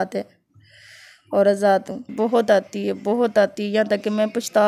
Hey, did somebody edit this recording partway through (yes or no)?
yes